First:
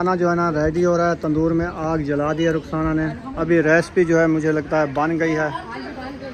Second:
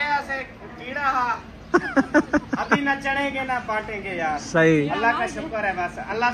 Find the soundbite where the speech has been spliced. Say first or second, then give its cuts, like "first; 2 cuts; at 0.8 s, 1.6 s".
first; 1 cut; at 3.2 s